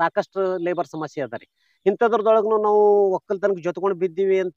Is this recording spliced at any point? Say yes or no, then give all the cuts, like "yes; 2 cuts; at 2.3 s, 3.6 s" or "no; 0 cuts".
no; 0 cuts